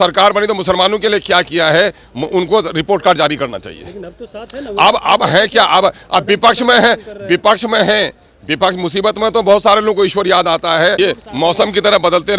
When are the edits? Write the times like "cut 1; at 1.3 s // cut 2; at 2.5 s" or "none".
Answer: cut 1; at 11.0 s